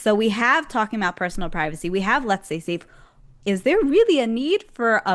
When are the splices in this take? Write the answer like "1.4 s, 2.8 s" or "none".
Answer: none